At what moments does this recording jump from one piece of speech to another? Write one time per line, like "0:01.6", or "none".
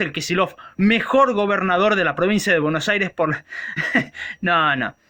none